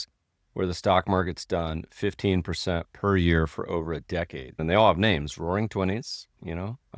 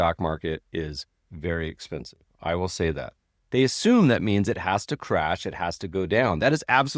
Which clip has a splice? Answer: first; 1 cut; at 4.5 s

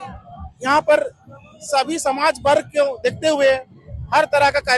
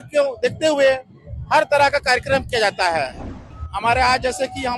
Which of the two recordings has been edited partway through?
second; 1 cut; at 3.2 s

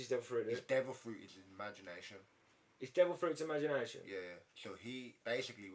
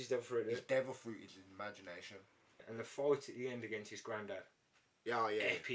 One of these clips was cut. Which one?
second; 1 cut; at 2.6 s

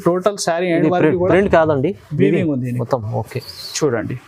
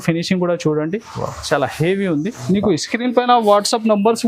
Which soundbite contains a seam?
second; 1 cut; at 2.4 s

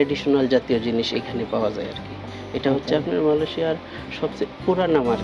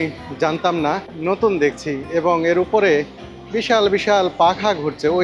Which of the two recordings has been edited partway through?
second; 1 cut; at 1.1 s

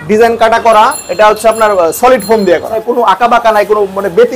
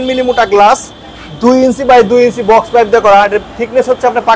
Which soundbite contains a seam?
first; 1 cut; at 2.7 s

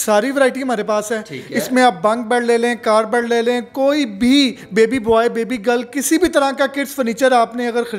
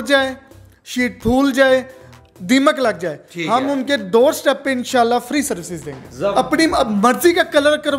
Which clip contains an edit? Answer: second; 1 cut; at 6.3 s

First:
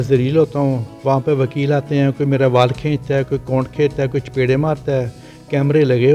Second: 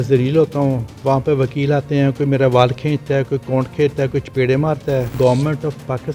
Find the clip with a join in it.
second; 1 cut; at 5.1 s

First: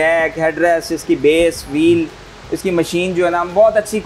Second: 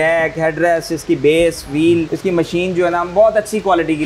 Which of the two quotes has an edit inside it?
second; 1 cut; at 2.1 s

